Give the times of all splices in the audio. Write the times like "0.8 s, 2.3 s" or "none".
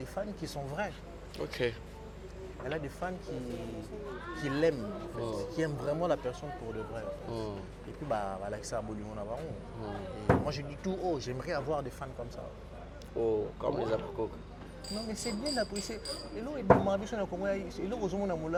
none